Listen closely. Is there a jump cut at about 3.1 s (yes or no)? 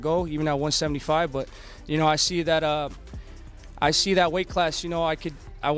no